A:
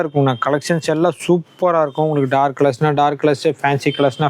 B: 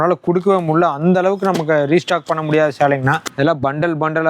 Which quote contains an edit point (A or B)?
B